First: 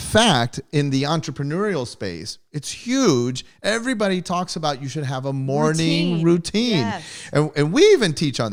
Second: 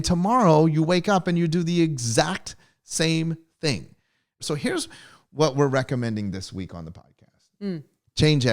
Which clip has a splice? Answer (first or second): second